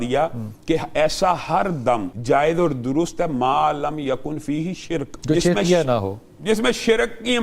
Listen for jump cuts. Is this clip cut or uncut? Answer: cut